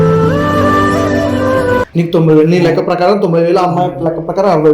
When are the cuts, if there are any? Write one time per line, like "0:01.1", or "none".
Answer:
0:01.9